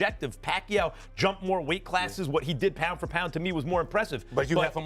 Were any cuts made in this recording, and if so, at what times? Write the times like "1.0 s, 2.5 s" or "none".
none